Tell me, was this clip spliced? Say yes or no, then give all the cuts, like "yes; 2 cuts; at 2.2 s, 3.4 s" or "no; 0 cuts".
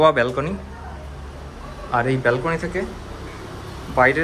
no; 0 cuts